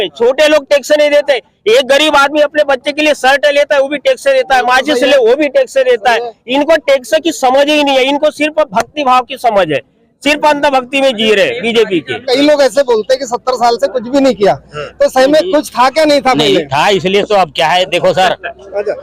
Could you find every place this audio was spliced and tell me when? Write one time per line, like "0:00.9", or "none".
0:12.1